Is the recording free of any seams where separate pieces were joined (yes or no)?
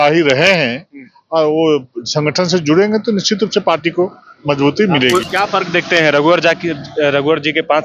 no